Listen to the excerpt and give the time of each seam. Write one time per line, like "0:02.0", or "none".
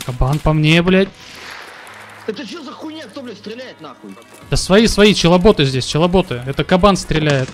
0:04.3